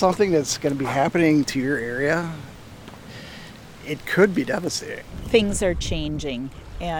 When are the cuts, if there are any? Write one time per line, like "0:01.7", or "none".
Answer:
0:05.2